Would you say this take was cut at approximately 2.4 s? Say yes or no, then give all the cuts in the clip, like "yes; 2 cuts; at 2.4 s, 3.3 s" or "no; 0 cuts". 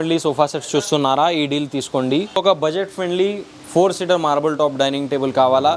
yes; 1 cut; at 2.4 s